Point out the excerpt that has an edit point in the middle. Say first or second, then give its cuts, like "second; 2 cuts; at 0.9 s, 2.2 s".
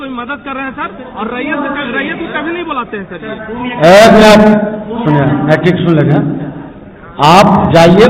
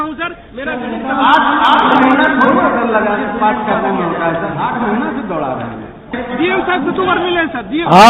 second; 1 cut; at 6.1 s